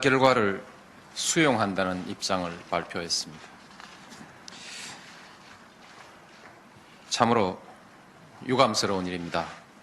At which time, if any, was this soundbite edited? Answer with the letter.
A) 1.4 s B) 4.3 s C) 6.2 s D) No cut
C